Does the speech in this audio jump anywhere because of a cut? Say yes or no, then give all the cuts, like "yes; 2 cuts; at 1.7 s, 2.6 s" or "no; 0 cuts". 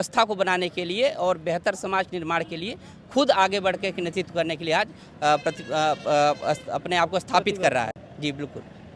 no; 0 cuts